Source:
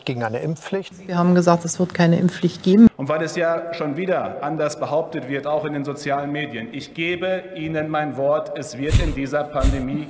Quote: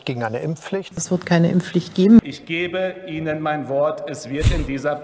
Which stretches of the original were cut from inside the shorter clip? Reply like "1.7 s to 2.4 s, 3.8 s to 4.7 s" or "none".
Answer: 1.0 s to 1.7 s, 3.0 s to 6.8 s